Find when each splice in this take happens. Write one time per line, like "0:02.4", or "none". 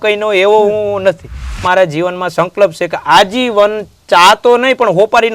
0:01.6